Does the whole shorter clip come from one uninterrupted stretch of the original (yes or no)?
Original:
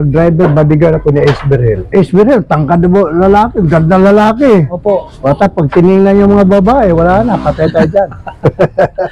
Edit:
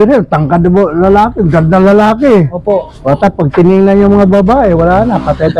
yes